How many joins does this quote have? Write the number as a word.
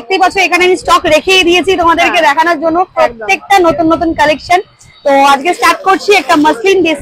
zero